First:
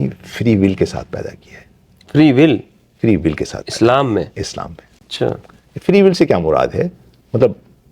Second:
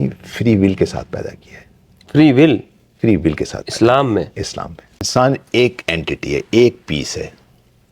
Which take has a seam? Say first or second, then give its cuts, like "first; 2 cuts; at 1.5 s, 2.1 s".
second; 1 cut; at 5.1 s